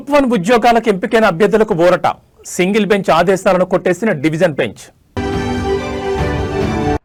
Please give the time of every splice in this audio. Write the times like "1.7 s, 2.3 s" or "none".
none